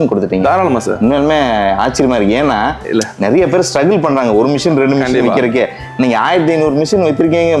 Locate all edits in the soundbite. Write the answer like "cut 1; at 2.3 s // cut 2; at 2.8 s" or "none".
none